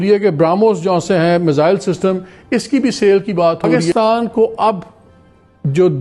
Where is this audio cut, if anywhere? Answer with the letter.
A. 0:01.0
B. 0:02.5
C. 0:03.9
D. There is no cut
C